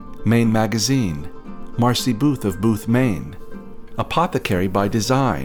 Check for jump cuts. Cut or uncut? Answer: uncut